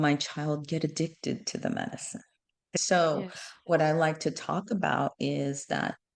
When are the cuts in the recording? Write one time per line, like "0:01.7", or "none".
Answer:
0:02.8